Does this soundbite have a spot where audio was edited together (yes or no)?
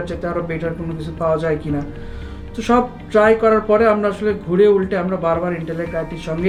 no